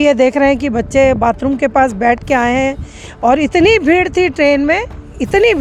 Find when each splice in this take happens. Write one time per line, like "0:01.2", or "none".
none